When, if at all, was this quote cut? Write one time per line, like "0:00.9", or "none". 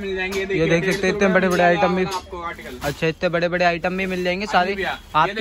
none

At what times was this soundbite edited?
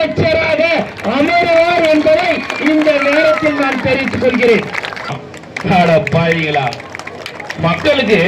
0:05.3

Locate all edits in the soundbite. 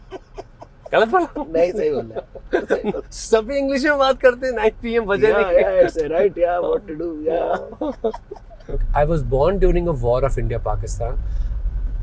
0:08.8

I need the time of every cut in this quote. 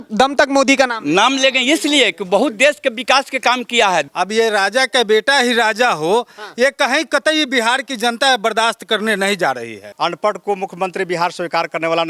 0:04.1
0:09.8

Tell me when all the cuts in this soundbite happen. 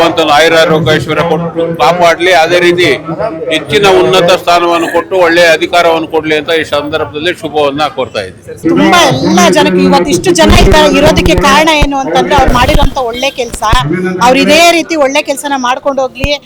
0:08.6

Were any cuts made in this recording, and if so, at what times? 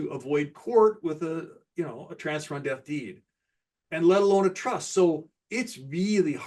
none

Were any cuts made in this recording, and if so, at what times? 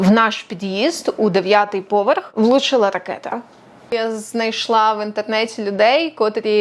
0:02.3
0:03.7

